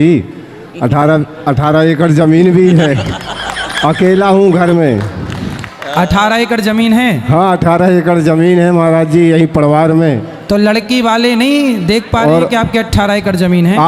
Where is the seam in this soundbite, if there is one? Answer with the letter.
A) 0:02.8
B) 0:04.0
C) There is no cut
C